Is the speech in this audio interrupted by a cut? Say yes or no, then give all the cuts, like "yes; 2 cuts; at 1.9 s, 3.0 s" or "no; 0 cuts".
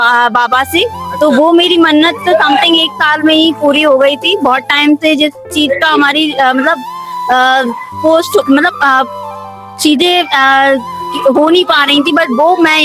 no; 0 cuts